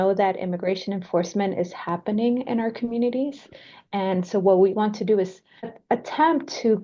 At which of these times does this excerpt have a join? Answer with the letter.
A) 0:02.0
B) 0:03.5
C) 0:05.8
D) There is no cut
C